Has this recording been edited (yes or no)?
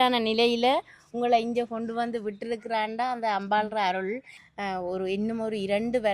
yes